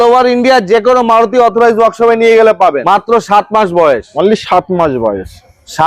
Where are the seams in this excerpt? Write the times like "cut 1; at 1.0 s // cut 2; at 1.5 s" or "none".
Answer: cut 1; at 2.8 s